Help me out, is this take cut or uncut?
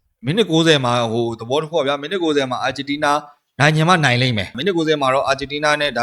cut